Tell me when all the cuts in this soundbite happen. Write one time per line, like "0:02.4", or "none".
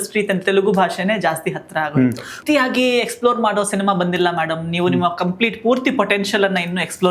0:02.4